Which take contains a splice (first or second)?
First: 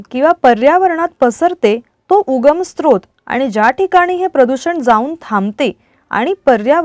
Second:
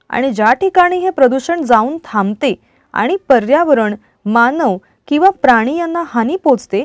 first